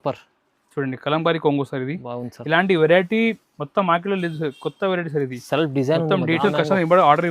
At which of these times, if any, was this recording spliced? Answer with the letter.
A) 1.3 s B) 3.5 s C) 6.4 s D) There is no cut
C